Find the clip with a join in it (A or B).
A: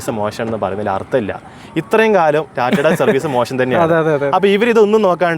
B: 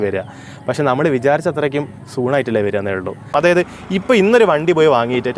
B